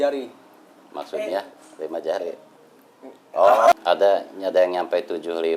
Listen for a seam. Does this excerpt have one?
yes; 1 cut; at 3.7 s

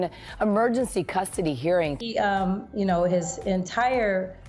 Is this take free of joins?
no; 1 cut; at 1.9 s

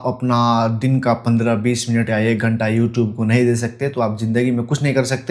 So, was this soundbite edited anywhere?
no; 0 cuts

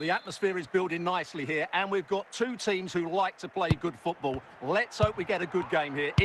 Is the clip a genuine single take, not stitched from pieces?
yes; 0 cuts

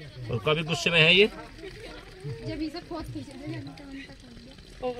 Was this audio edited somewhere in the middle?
no; 0 cuts

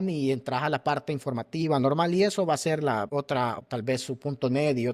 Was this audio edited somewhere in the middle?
yes; 1 cut; at 3.6 s

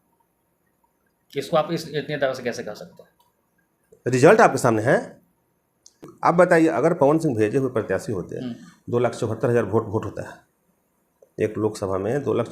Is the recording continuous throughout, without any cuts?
no; 1 cut; at 6.0 s

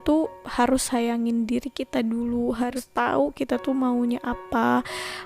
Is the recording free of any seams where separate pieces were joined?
no; 1 cut; at 2.9 s

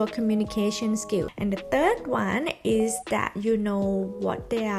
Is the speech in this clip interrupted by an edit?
yes; 1 cut; at 1.3 s

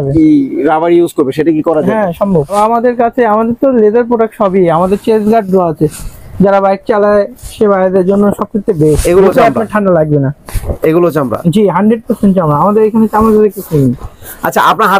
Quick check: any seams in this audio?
no; 0 cuts

